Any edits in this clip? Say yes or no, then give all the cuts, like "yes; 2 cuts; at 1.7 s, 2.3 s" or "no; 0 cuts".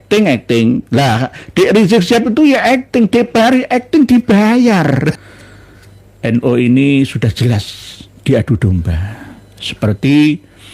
yes; 1 cut; at 5.1 s